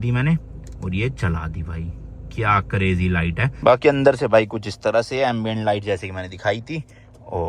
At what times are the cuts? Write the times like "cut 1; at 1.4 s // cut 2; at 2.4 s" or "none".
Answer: cut 1; at 3.5 s